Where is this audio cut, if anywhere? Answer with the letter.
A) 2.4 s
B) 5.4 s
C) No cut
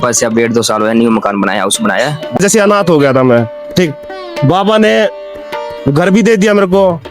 A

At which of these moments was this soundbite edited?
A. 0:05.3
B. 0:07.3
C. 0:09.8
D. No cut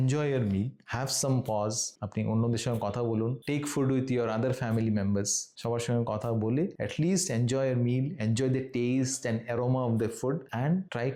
D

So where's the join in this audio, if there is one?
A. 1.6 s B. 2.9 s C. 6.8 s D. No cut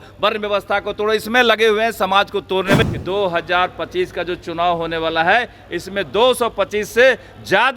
B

